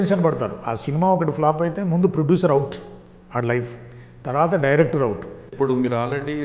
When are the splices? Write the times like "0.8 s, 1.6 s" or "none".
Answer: 5.5 s